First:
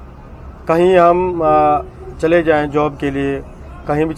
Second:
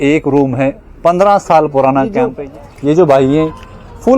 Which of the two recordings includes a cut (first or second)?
second